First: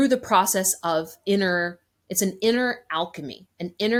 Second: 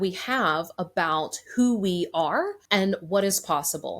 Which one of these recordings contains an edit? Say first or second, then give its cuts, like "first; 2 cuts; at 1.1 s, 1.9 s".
second; 1 cut; at 2.6 s